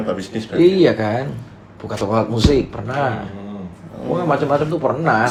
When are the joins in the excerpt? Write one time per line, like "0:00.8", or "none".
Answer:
none